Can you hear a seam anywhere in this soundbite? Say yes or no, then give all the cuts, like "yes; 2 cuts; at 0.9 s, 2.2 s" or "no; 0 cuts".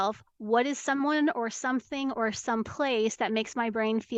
no; 0 cuts